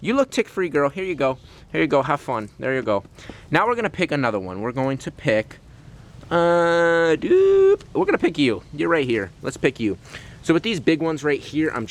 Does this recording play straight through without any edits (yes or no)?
yes